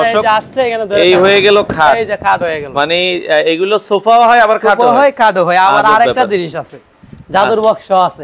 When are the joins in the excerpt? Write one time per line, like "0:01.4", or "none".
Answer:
none